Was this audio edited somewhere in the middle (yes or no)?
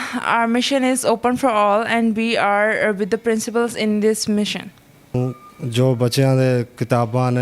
yes